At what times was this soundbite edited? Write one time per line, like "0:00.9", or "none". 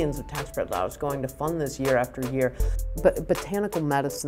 0:02.8